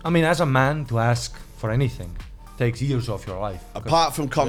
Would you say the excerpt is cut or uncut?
uncut